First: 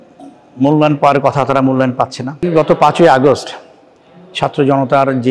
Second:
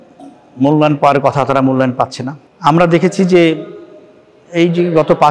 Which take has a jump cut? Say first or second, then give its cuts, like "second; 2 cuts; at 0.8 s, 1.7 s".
first; 1 cut; at 2.4 s